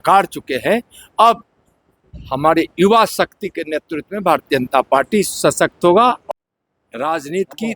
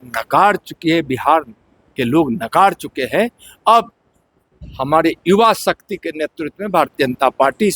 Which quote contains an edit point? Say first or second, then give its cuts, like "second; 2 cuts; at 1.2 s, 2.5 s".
first; 1 cut; at 6.2 s